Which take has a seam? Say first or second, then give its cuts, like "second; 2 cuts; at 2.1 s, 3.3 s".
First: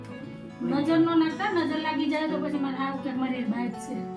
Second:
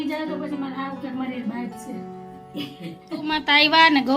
second; 1 cut; at 3.1 s